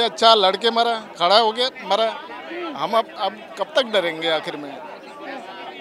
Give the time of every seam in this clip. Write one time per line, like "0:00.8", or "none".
none